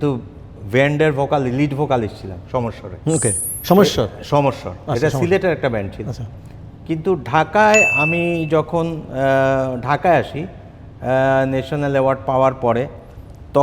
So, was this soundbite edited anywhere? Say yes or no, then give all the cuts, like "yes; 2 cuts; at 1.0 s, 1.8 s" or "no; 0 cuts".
no; 0 cuts